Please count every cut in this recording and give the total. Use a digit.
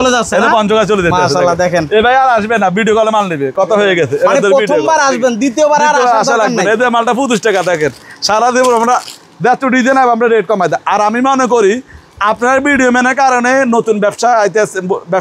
0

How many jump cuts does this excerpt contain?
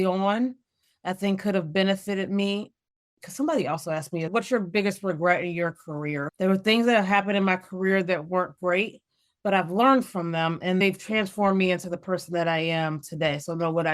4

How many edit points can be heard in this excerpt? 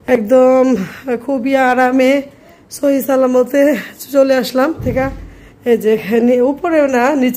1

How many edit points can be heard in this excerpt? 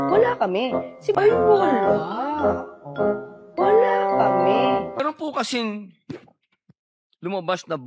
1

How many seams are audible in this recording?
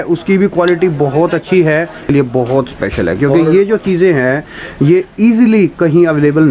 1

